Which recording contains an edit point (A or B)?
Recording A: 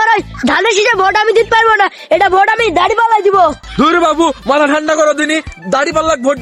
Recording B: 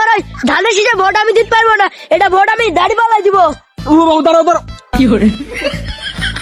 A